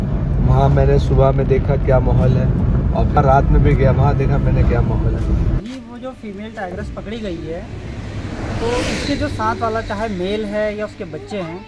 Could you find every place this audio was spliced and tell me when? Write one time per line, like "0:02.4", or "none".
0:05.6